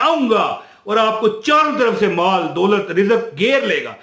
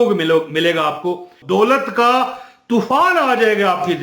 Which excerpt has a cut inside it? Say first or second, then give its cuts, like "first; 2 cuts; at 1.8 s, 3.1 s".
second; 1 cut; at 1.3 s